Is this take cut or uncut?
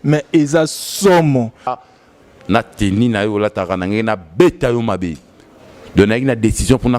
cut